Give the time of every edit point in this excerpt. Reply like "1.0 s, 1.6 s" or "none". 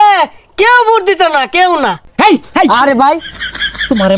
2.0 s